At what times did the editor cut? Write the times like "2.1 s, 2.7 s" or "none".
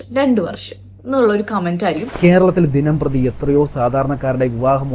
2.1 s

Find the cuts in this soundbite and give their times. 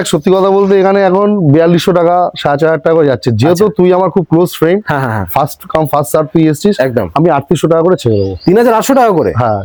none

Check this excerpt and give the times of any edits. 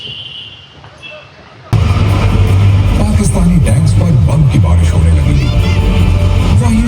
1.7 s

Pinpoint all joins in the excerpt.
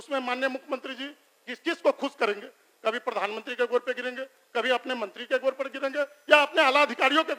none

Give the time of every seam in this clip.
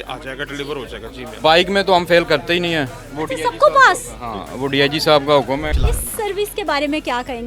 1.2 s, 5.7 s

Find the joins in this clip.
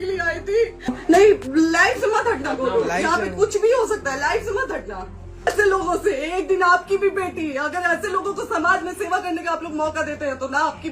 0.9 s, 5.5 s

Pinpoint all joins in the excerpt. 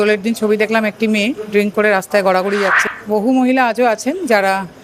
2.8 s

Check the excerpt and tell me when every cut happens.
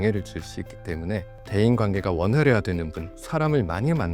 1.4 s

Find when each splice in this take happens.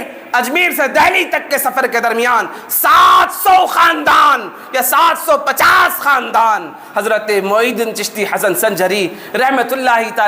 none

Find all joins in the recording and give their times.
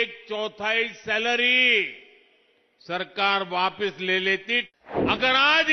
4.7 s

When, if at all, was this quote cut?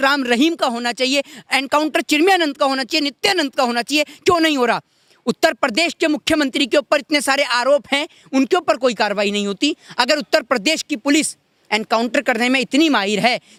none

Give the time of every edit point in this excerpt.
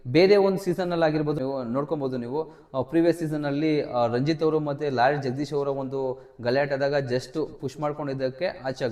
none

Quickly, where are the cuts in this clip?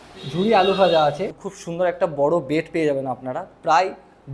1.3 s

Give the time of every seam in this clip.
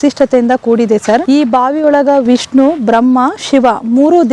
1.2 s

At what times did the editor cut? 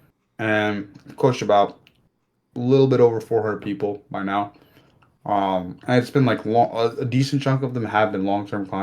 none

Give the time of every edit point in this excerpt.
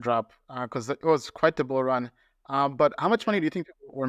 none

